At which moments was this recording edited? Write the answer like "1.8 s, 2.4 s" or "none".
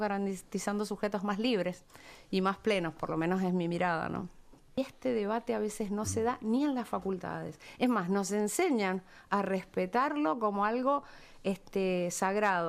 4.8 s